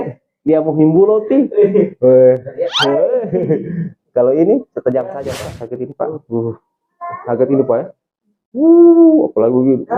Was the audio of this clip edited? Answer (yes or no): yes